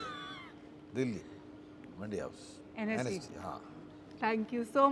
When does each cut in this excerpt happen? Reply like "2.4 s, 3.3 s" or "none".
none